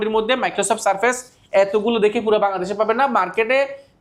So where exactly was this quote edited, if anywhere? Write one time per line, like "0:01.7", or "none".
none